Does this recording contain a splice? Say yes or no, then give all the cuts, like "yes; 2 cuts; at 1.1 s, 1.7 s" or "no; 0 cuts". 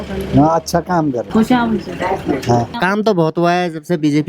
yes; 2 cuts; at 1.2 s, 2.7 s